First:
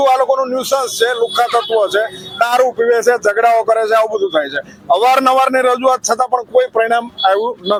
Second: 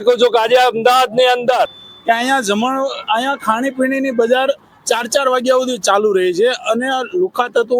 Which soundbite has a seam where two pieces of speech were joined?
second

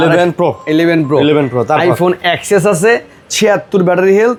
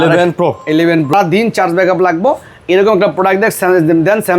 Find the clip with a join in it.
second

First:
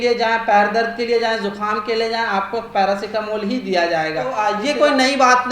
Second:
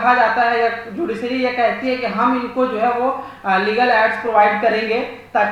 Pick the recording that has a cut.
first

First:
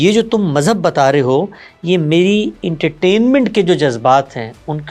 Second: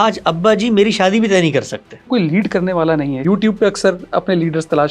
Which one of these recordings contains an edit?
second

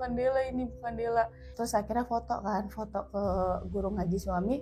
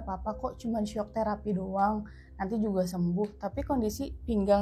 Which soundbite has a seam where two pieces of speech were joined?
first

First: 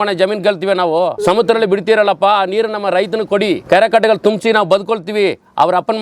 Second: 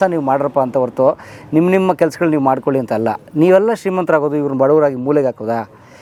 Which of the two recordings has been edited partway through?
first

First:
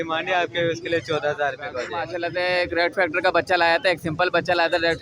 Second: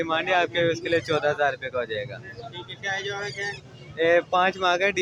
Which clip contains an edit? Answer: first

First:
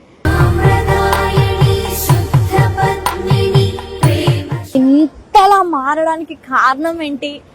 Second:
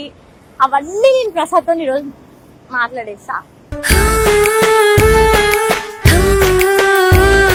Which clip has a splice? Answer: first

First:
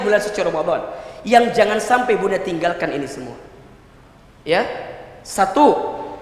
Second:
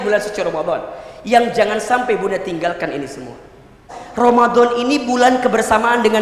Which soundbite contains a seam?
second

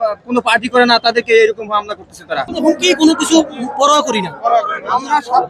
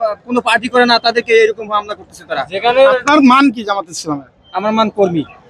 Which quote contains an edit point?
first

